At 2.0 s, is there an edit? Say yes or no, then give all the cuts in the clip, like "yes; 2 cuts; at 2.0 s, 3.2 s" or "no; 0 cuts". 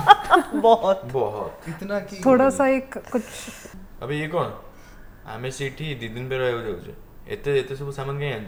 no; 0 cuts